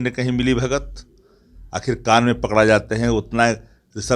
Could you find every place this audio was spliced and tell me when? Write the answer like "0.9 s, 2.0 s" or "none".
none